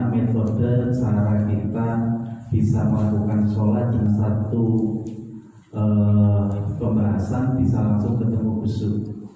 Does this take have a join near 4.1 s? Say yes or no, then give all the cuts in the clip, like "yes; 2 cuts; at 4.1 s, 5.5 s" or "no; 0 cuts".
yes; 1 cut; at 4.1 s